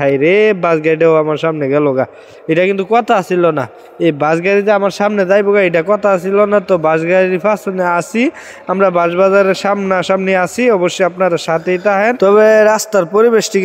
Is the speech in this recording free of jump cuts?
yes; 0 cuts

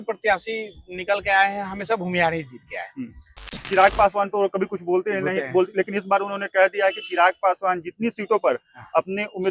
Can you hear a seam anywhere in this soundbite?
yes; 1 cut; at 3.6 s

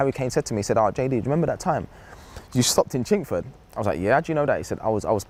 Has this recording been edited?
no; 0 cuts

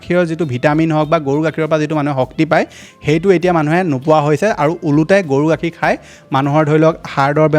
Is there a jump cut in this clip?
no; 0 cuts

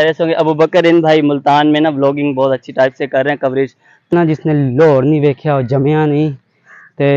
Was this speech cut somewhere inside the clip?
yes; 1 cut; at 4.1 s

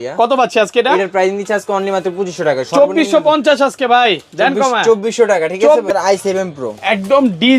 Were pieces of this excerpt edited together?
yes; 1 cut; at 5.9 s

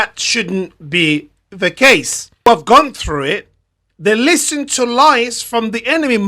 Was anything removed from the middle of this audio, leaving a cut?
yes; 1 cut; at 2.5 s

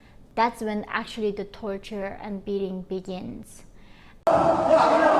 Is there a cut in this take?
yes; 1 cut; at 4.1 s

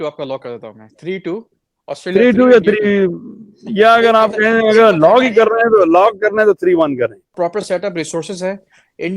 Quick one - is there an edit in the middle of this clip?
yes; 1 cut; at 7.3 s

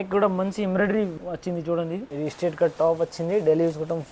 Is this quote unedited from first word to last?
no; 2 cuts; at 1.1 s, 2.1 s

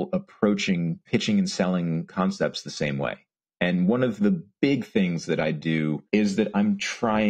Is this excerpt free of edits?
no; 3 cuts; at 1.0 s, 4.5 s, 6.0 s

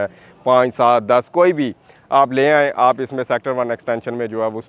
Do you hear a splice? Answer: no; 0 cuts

